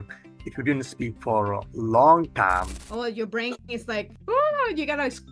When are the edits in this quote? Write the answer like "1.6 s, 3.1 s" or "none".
2.8 s, 4.1 s